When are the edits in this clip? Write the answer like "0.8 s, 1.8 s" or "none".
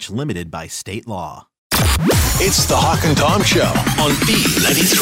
1.6 s

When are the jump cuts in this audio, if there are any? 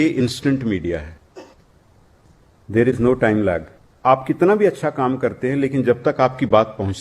3.9 s

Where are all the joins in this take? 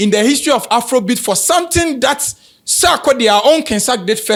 none

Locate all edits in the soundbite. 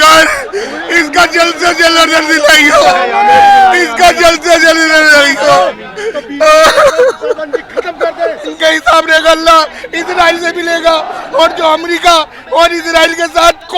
8.5 s

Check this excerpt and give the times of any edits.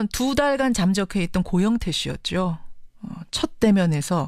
1.1 s

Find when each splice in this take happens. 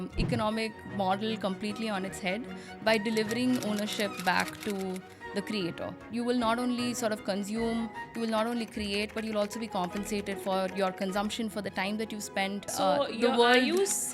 6.1 s, 12.7 s

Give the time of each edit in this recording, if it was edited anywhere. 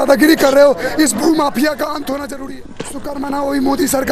2.4 s

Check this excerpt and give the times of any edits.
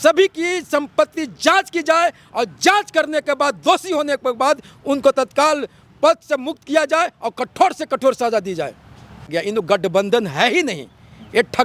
9.3 s

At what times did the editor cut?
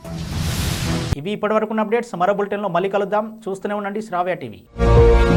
none

